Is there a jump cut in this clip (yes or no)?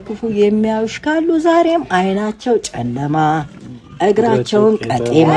no